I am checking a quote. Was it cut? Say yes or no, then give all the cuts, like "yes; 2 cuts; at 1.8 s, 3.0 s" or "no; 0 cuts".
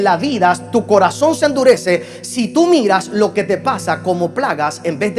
no; 0 cuts